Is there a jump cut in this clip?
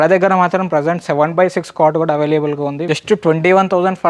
yes; 1 cut; at 2.8 s

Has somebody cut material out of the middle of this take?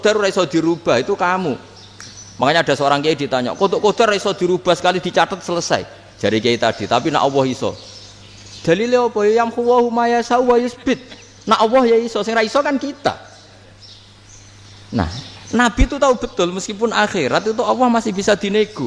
no; 0 cuts

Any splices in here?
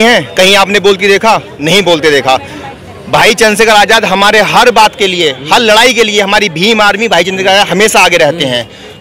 no; 0 cuts

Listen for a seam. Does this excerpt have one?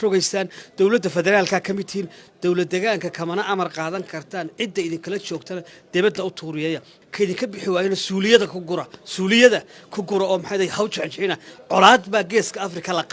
yes; 2 cuts; at 2.2 s, 7.0 s

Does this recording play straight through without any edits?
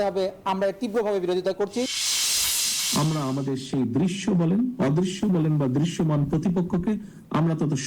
no; 1 cut; at 2.4 s

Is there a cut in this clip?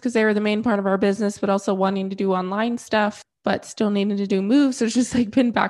yes; 1 cut; at 3.3 s

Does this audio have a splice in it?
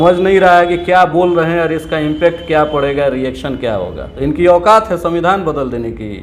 yes; 1 cut; at 4.0 s

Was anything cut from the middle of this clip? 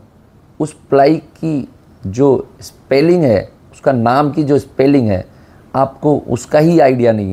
no; 0 cuts

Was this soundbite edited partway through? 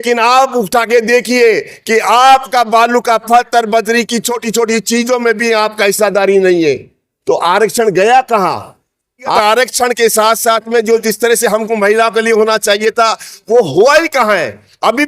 yes; 1 cut; at 9.4 s

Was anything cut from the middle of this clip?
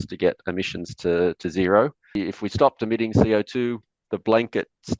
yes; 1 cut; at 2.2 s

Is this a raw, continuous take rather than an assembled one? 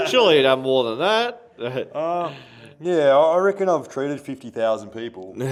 yes; 0 cuts

